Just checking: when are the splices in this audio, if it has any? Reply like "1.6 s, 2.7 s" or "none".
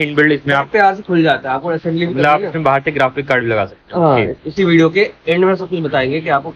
4.4 s